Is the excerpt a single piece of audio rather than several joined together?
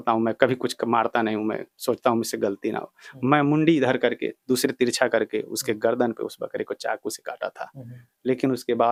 yes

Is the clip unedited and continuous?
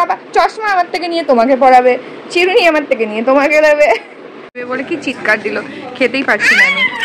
no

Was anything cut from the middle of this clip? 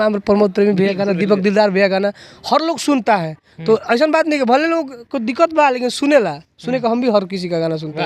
no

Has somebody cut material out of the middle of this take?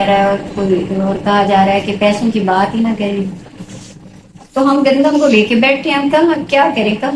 no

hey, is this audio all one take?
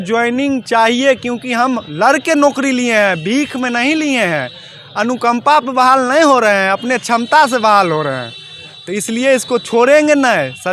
yes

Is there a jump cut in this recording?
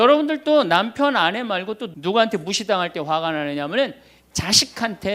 yes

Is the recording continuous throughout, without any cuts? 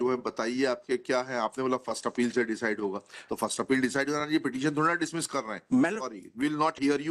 yes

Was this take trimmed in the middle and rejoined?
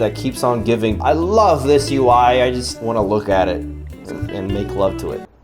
yes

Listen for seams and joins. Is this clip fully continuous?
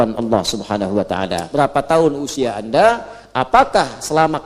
no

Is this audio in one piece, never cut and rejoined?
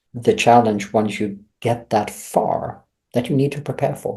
yes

